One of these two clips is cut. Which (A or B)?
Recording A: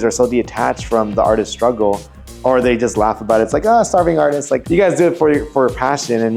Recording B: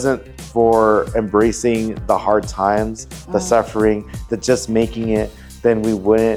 A